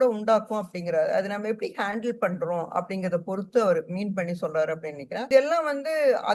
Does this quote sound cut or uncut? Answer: uncut